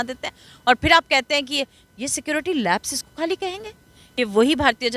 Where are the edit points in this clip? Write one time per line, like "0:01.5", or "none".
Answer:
0:04.0